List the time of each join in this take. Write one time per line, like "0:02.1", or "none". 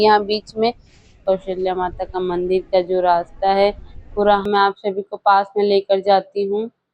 0:01.2
0:04.4